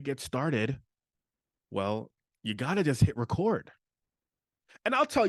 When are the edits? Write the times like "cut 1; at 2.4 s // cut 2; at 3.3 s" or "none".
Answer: none